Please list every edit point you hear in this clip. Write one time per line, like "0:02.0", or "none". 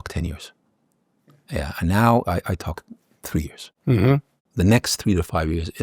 0:04.4